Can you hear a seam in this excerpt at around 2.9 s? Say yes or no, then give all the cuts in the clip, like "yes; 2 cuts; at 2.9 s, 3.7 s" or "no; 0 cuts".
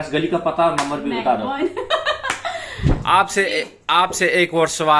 yes; 1 cut; at 2.9 s